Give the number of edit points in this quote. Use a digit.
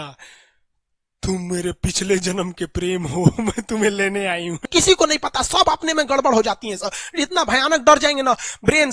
1